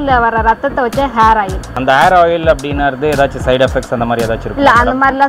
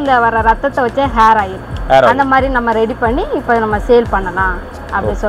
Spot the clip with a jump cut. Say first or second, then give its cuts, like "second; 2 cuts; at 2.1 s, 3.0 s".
first; 1 cut; at 1.8 s